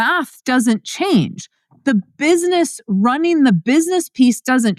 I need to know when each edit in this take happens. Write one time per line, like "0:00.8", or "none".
none